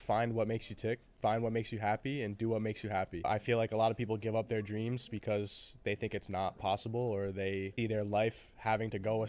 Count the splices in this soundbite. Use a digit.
3